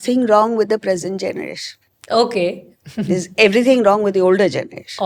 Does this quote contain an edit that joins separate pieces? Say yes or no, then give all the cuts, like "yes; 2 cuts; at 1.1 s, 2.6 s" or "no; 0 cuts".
no; 0 cuts